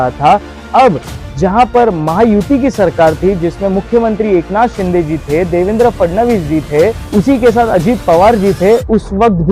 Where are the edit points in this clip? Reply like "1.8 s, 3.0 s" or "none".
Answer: none